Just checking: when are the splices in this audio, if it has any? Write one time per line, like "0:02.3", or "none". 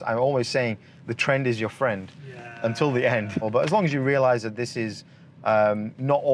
0:03.5